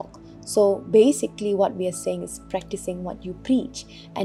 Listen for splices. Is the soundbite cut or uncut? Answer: uncut